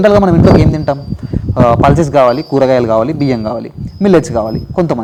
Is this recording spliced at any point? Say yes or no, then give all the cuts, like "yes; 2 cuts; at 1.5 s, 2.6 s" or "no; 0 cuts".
no; 0 cuts